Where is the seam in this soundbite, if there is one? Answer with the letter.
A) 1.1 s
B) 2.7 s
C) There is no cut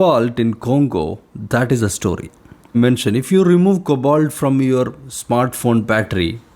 B